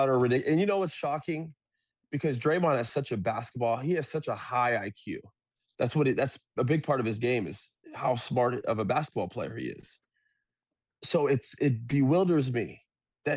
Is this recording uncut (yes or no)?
yes